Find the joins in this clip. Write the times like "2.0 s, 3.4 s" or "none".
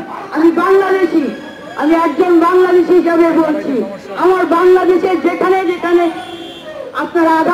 none